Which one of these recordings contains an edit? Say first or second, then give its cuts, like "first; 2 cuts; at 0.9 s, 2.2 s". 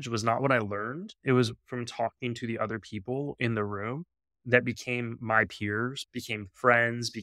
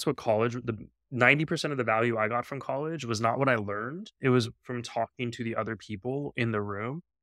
first; 1 cut; at 6.0 s